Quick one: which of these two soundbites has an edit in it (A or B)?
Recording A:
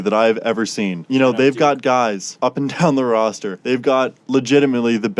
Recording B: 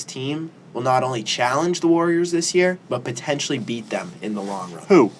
A